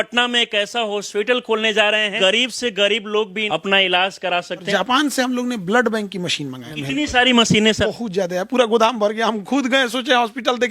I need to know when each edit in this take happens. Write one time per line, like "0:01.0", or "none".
0:02.1
0:03.4
0:04.7
0:06.7
0:07.8